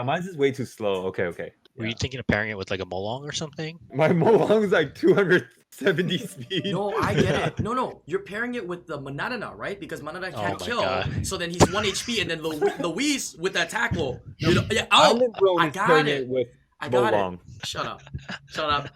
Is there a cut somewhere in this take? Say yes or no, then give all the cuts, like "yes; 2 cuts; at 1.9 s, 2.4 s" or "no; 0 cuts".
yes; 4 cuts; at 1.6 s, 3.9 s, 8.0 s, 17.6 s